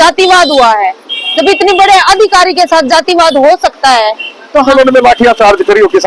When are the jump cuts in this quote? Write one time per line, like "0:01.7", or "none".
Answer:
0:04.7